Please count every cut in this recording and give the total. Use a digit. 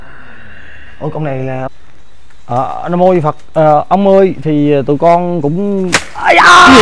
1